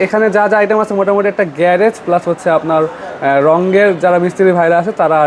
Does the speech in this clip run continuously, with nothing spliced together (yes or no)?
yes